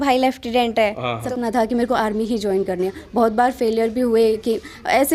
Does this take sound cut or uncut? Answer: cut